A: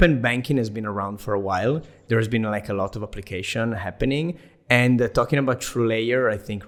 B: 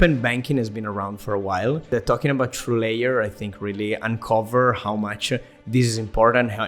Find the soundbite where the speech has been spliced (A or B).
B